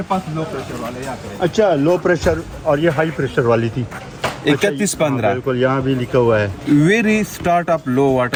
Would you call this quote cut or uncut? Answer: uncut